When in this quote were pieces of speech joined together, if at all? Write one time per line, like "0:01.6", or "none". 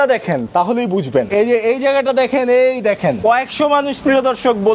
0:01.2
0:03.2